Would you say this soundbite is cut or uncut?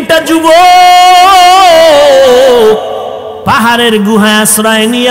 cut